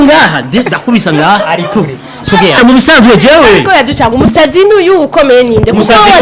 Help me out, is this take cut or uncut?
cut